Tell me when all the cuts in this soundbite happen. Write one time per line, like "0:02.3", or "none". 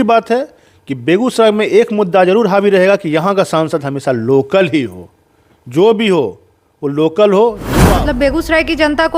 0:07.7